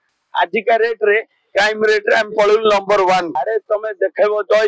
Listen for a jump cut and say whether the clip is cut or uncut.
cut